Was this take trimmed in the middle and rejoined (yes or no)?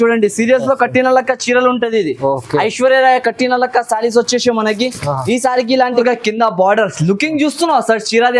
yes